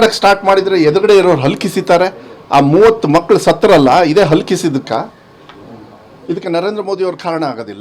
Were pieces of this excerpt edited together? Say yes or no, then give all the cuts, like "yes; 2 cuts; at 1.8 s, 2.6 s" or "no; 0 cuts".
no; 0 cuts